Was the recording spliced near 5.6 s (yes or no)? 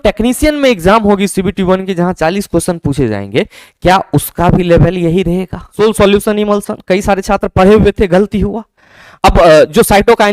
yes